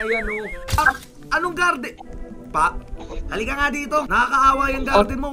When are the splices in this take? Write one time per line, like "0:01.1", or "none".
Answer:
0:00.7
0:04.1